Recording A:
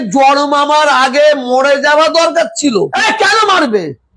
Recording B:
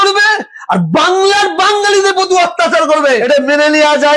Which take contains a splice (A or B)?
A